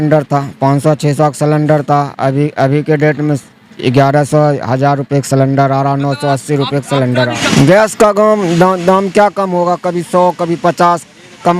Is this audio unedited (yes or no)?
no